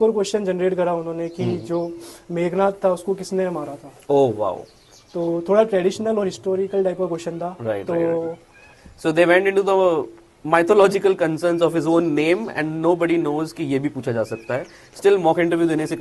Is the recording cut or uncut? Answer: uncut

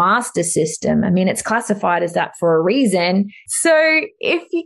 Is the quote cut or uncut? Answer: cut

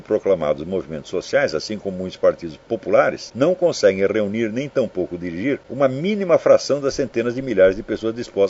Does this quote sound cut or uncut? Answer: cut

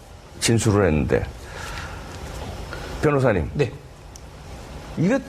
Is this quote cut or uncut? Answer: cut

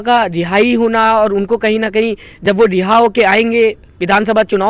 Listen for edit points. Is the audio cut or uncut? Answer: uncut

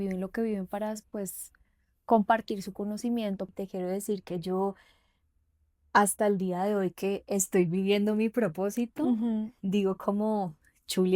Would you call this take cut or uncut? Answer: cut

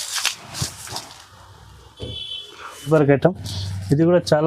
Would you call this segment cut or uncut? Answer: cut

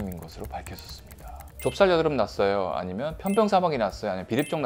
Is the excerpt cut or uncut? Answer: cut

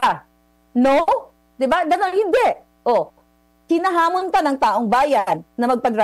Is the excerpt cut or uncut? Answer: uncut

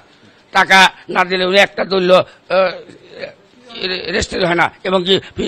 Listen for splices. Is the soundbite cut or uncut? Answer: uncut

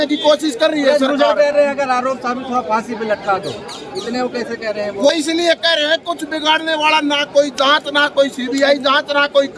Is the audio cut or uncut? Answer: uncut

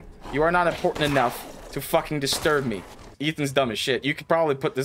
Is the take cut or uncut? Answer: cut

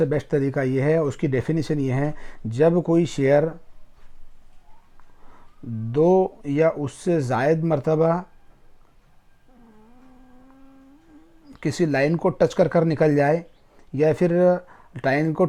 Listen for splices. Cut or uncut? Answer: uncut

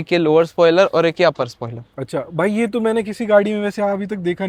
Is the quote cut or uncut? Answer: uncut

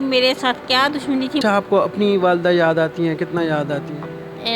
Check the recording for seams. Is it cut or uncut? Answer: cut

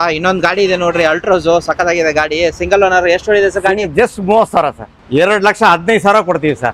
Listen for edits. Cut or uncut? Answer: cut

